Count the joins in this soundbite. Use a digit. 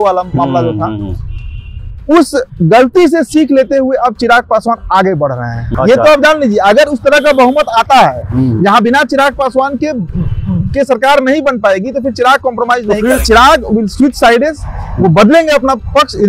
2